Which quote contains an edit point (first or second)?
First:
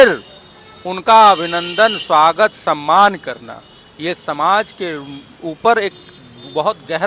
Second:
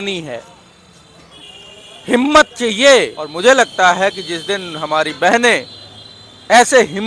second